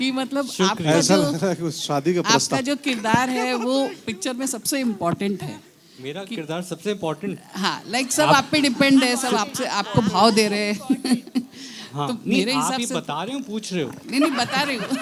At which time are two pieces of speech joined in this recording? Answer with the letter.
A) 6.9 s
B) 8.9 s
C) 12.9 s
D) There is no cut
D